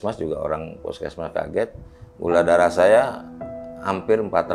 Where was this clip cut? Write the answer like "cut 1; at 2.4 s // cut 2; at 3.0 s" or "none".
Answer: none